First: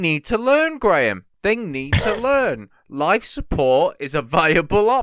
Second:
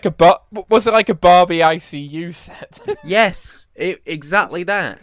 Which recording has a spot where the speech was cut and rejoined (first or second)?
second